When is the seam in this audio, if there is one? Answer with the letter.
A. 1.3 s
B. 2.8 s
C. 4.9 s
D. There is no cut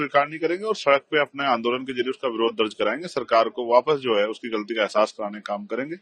D